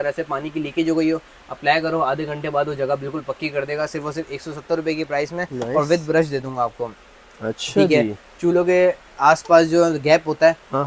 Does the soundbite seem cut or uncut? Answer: uncut